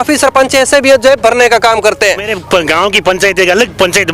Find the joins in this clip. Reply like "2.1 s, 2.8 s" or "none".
2.3 s